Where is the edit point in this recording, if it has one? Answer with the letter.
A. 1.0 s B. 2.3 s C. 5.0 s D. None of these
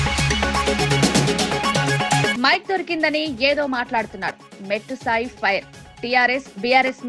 B